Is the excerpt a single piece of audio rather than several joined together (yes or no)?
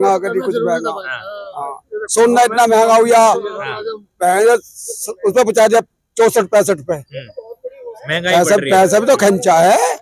yes